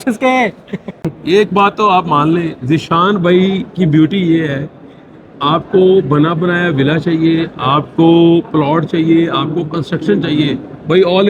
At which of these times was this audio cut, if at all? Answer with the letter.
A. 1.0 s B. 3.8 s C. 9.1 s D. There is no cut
A